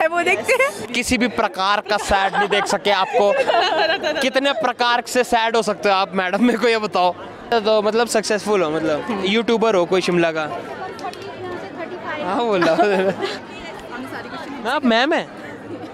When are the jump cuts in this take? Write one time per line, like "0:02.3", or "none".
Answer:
0:00.9
0:07.5
0:13.5